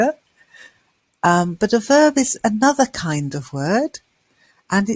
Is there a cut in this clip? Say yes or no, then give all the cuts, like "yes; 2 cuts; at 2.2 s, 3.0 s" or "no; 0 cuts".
no; 0 cuts